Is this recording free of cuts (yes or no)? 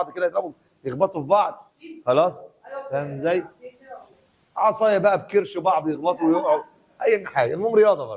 yes